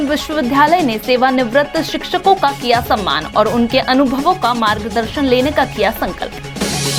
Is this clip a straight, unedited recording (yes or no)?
yes